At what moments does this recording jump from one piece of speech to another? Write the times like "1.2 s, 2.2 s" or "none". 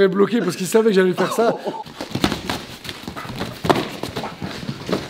1.7 s